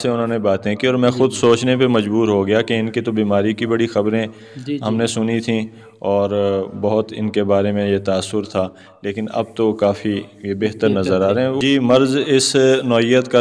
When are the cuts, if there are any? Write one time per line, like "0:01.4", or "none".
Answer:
0:11.6